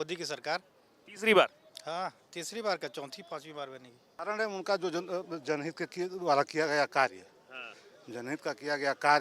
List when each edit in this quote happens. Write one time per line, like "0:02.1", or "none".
0:04.2